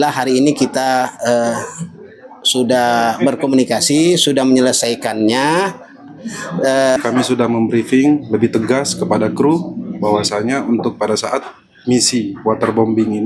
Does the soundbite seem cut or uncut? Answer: cut